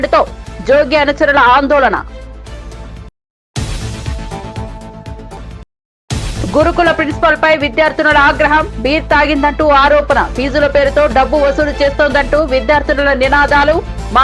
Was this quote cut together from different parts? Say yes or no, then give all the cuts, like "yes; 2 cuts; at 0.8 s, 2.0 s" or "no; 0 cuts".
no; 0 cuts